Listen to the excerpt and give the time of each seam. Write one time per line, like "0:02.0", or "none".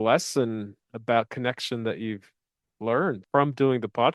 0:03.2